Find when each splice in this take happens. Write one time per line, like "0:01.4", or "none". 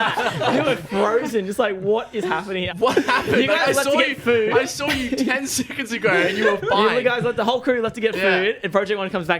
0:02.7